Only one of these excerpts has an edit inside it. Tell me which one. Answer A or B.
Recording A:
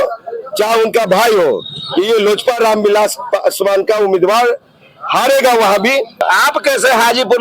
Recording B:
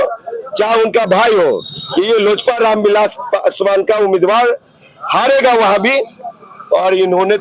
A